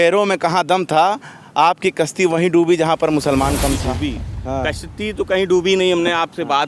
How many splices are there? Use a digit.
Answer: 1